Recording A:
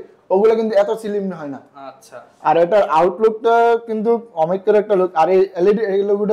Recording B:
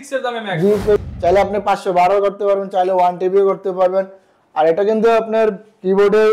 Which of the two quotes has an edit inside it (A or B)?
B